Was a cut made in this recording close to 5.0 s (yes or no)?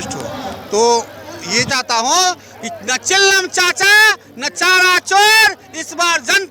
no